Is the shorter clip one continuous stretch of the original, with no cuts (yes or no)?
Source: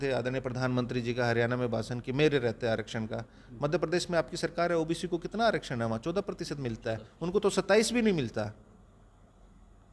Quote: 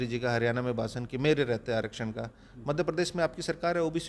yes